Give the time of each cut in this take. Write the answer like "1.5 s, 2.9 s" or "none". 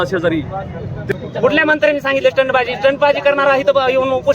1.1 s